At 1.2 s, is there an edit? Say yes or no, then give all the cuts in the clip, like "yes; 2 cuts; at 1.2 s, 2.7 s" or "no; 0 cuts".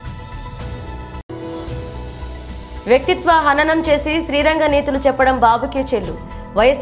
yes; 1 cut; at 1.2 s